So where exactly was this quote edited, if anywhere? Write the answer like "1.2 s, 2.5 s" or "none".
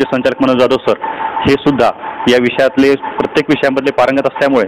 none